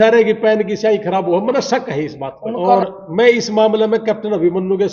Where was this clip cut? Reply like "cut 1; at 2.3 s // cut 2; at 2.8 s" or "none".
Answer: cut 1; at 2.8 s